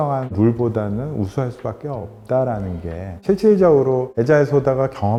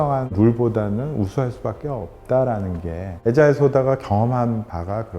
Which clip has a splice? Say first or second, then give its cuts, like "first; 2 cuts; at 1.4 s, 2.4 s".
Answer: second; 1 cut; at 3.2 s